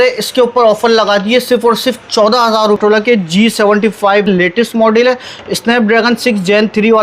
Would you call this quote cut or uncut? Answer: cut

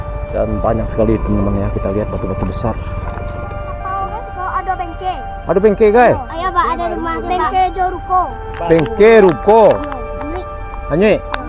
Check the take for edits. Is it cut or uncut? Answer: cut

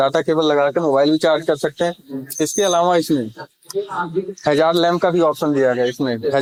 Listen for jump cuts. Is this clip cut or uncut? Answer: uncut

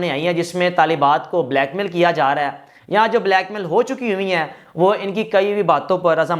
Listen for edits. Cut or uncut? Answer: uncut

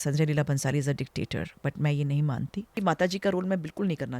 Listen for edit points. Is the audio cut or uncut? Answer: cut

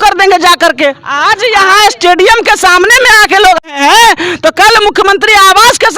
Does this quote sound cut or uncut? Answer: cut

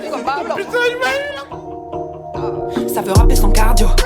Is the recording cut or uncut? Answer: cut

